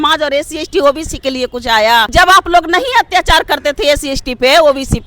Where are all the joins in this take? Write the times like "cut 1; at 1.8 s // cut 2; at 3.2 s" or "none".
cut 1; at 2.1 s